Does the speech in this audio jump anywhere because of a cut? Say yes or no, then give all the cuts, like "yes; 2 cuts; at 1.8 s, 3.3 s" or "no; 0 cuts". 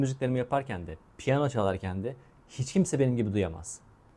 no; 0 cuts